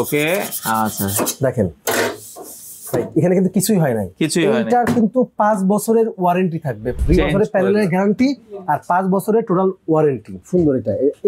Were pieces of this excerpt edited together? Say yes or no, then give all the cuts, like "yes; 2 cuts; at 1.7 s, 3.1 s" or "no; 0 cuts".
yes; 2 cuts; at 6.9 s, 10.4 s